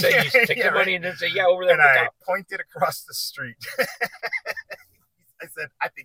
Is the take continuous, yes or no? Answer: yes